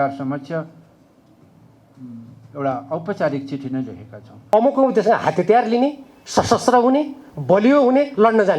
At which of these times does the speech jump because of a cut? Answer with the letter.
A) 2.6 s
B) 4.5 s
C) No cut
B